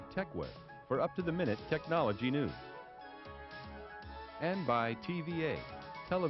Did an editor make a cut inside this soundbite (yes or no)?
no